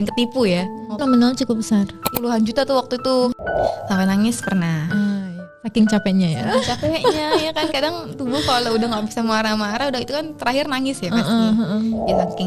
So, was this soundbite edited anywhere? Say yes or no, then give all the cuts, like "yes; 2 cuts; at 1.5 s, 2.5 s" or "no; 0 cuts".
yes; 4 cuts; at 1.0 s, 2.1 s, 3.3 s, 5.2 s